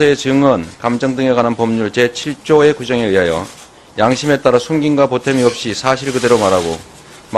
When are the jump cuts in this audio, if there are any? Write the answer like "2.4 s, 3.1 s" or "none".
1.1 s